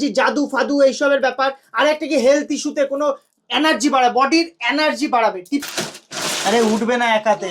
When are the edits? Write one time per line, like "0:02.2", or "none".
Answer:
0:05.6